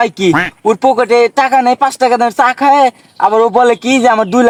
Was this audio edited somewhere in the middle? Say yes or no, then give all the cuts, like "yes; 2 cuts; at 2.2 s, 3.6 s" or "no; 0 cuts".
no; 0 cuts